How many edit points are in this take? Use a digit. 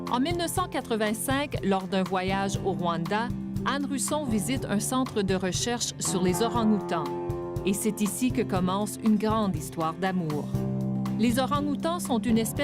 1